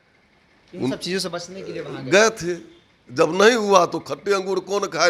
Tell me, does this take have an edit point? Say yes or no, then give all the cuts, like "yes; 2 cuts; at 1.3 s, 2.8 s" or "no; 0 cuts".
no; 0 cuts